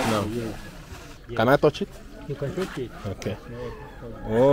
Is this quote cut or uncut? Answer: cut